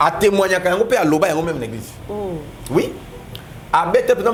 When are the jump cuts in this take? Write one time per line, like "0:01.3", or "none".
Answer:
none